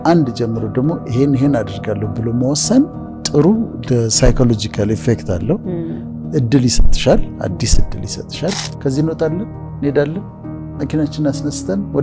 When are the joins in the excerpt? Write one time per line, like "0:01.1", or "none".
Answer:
0:08.7